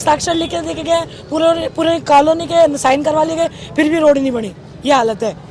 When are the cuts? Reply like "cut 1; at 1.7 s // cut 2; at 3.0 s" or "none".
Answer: none

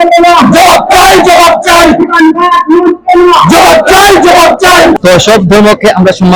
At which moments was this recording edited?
none

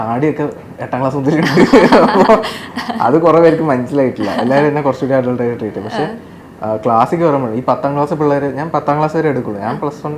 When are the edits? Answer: none

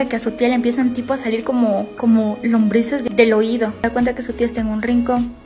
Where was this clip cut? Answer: cut 1; at 3.1 s // cut 2; at 3.8 s

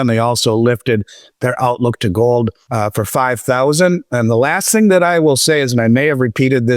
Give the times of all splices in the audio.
cut 1; at 2.6 s

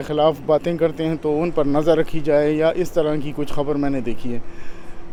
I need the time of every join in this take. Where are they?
none

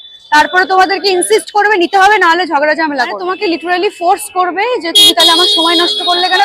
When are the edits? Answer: cut 1; at 3.2 s

